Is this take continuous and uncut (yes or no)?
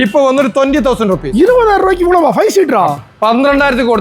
no